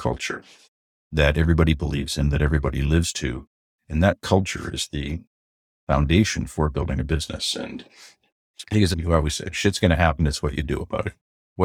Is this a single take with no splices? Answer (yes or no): no